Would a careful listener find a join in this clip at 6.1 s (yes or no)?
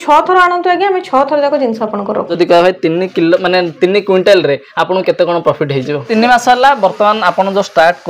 yes